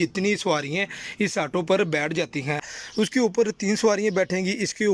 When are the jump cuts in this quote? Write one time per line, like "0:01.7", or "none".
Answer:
0:02.6